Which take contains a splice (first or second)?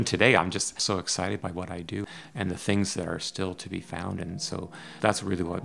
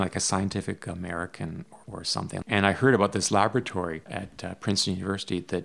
second